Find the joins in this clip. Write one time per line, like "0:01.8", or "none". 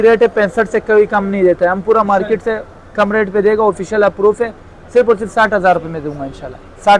none